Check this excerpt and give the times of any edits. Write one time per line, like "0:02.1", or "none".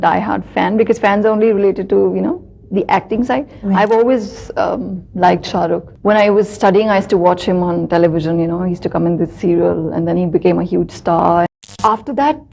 0:05.9
0:11.5

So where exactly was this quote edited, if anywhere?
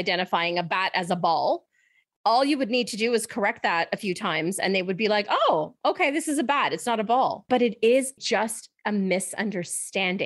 0:07.4

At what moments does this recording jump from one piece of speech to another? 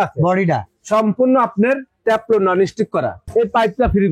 0:03.2

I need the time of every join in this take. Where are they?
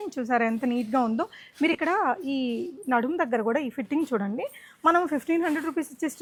none

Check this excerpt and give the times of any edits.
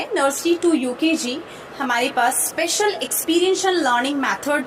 none

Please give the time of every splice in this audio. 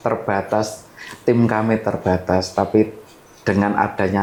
none

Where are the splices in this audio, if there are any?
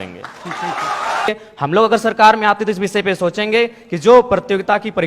0:01.3

